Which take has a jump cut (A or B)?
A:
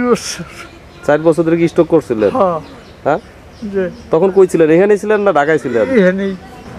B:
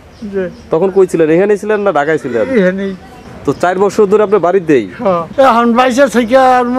B